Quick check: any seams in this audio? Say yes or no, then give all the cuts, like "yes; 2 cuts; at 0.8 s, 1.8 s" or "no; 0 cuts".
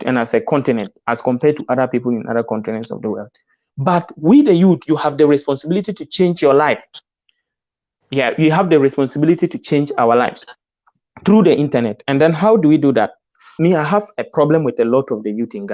yes; 1 cut; at 13.5 s